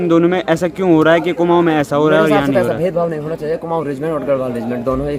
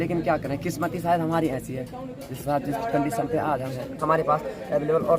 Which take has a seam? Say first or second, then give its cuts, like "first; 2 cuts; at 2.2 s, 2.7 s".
second; 1 cut; at 4.0 s